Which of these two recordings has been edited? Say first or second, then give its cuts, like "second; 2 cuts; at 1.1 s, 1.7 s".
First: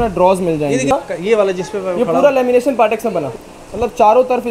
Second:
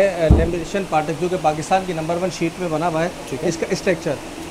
first; 2 cuts; at 0.9 s, 3.3 s